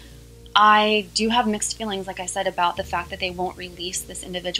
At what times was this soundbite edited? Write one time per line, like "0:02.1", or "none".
none